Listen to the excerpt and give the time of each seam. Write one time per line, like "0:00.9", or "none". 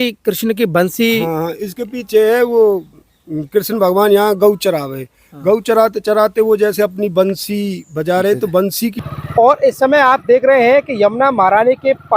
0:09.0